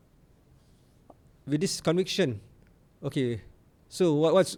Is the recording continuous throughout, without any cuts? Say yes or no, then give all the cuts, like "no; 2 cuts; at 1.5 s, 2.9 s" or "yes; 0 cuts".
yes; 0 cuts